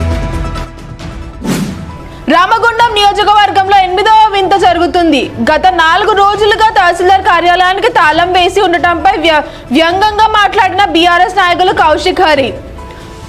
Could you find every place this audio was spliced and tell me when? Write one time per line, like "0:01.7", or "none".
0:01.8